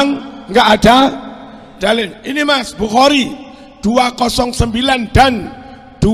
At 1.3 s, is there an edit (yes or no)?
no